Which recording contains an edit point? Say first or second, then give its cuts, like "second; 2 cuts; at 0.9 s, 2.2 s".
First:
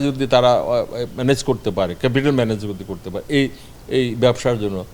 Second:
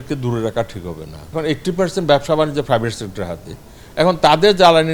second; 1 cut; at 1.3 s